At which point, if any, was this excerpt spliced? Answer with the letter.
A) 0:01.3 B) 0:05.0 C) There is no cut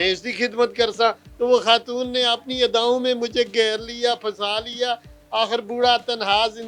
A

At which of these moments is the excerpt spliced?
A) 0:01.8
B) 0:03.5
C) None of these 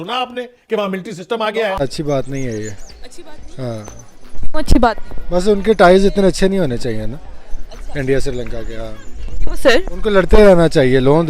A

